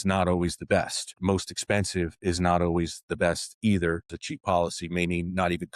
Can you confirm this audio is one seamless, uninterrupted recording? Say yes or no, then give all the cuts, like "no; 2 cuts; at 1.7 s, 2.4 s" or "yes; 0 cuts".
no; 2 cuts; at 1.1 s, 4.2 s